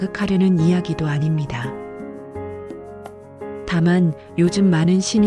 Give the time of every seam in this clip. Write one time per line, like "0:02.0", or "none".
none